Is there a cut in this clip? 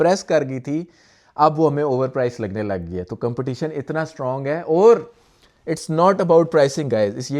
no; 0 cuts

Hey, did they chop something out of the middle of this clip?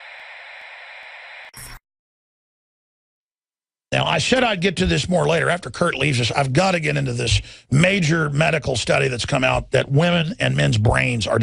no; 0 cuts

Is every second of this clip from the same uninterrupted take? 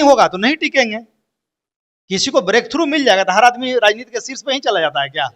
yes; 0 cuts

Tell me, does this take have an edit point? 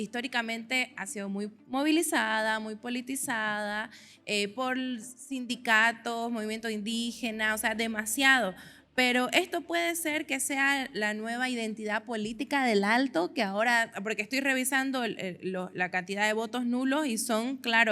no; 0 cuts

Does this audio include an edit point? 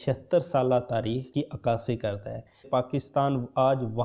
yes; 1 cut; at 2.7 s

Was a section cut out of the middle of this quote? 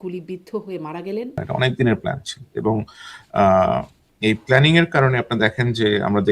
yes; 1 cut; at 1.4 s

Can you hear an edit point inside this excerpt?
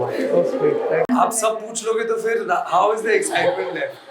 yes; 1 cut; at 1.1 s

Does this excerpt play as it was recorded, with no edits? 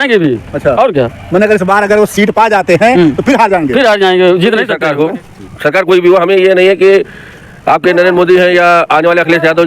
no; 1 cut; at 4.7 s

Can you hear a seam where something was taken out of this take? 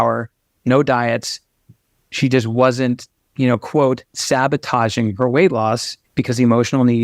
yes; 1 cut; at 6.0 s

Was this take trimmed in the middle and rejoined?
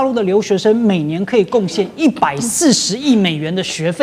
no; 0 cuts

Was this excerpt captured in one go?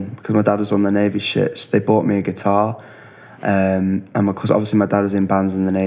yes; 0 cuts

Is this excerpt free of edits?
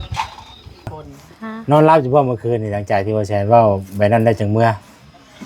no; 1 cut; at 1.1 s

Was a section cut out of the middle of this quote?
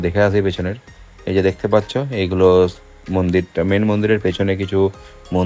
no; 0 cuts

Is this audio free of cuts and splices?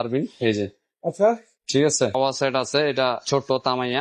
no; 1 cut; at 2.1 s

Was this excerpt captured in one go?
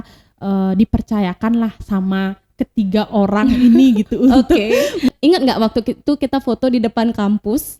no; 1 cut; at 5.1 s

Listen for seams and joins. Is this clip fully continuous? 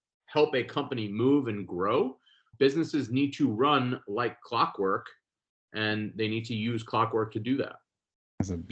no; 1 cut; at 2.5 s

